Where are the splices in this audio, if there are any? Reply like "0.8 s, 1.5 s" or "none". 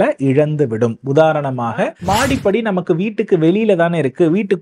2.0 s